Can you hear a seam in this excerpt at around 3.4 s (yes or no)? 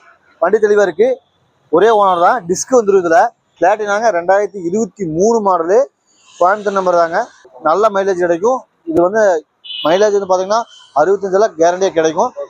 yes